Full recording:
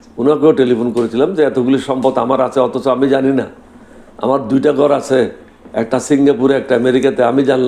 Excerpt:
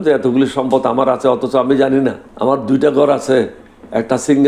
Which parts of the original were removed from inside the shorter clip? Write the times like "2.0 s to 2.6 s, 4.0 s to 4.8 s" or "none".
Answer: 3.6 s to 4.1 s

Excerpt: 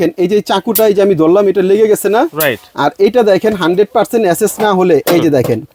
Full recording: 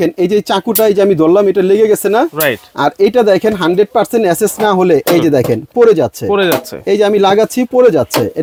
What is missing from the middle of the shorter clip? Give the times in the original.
none

